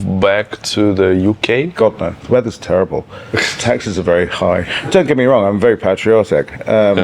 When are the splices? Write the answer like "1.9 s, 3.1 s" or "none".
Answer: 2.2 s, 4.8 s